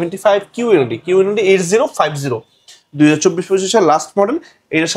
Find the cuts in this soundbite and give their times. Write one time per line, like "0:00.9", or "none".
none